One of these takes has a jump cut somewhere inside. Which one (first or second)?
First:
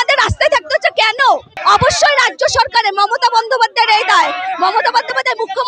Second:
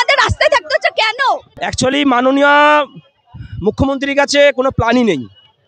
second